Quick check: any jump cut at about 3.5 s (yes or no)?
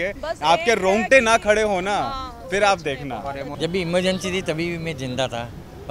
yes